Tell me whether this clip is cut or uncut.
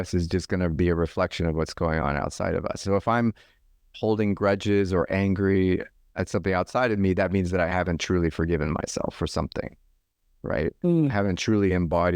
uncut